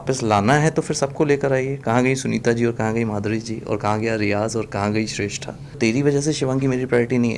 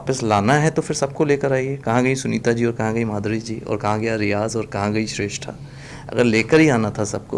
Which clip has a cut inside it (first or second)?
first